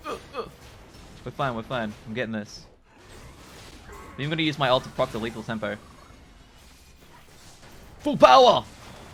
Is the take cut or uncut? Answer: uncut